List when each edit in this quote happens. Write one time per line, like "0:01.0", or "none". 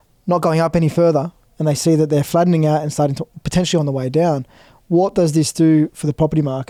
none